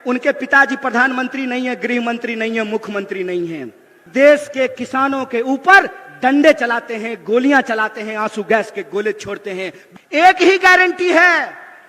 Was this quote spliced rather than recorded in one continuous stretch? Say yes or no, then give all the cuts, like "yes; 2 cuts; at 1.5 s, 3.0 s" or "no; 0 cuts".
yes; 2 cuts; at 4.0 s, 9.8 s